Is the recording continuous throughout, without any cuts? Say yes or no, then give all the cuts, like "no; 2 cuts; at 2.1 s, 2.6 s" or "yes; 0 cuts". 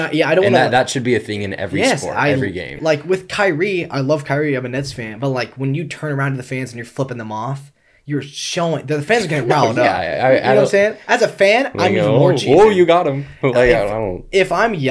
no; 1 cut; at 2.7 s